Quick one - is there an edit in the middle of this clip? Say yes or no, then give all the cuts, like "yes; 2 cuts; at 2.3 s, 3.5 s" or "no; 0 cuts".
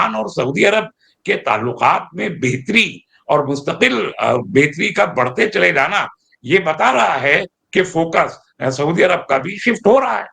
no; 0 cuts